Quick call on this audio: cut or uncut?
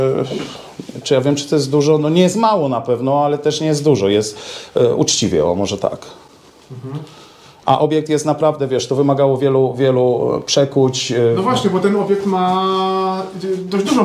uncut